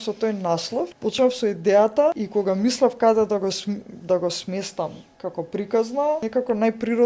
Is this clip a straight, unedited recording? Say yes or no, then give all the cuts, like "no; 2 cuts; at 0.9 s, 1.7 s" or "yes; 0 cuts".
no; 3 cuts; at 0.9 s, 2.2 s, 6.3 s